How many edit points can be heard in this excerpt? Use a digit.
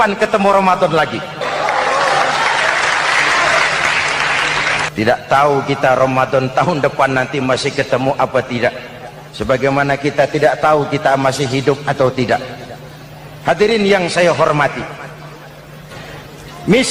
2